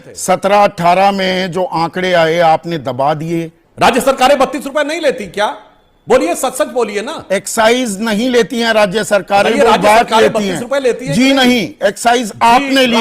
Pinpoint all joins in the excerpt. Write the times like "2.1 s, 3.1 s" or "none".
3.6 s